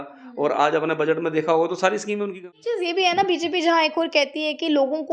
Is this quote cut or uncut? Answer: cut